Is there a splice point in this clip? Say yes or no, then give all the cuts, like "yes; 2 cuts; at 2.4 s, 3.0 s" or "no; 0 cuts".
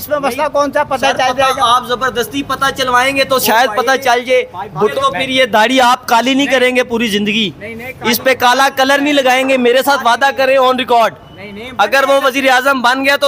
yes; 1 cut; at 4.7 s